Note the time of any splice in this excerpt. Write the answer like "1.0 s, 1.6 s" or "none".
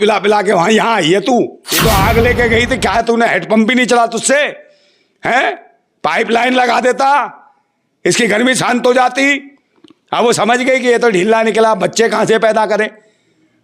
1.7 s